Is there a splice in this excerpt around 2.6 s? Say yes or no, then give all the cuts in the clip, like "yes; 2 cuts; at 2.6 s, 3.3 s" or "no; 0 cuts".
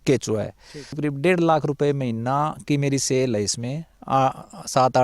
no; 1 cut; at 1.0 s